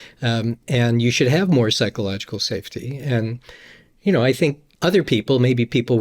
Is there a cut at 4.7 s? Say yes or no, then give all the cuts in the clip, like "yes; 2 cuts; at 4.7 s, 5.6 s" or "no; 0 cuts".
yes; 1 cut; at 4.7 s